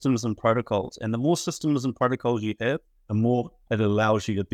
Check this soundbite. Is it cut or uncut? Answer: cut